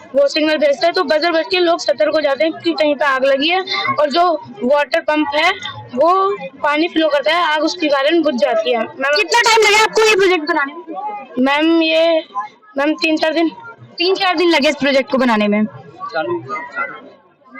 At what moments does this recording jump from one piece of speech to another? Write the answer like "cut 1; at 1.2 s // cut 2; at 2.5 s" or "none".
none